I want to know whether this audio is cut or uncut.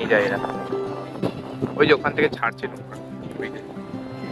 uncut